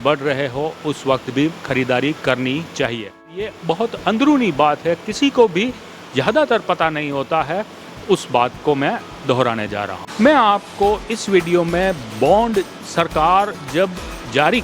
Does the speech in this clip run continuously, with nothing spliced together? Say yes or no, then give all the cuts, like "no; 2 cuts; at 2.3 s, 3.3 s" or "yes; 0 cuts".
no; 2 cuts; at 3.4 s, 10.0 s